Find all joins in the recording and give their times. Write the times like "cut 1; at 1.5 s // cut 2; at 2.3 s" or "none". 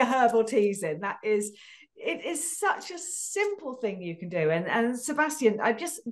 none

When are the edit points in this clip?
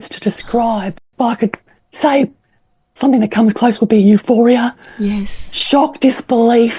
cut 1; at 1.0 s

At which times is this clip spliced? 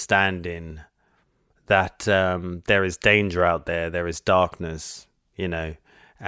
none

